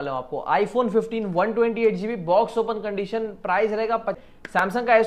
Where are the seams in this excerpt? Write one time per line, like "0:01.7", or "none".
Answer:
0:04.2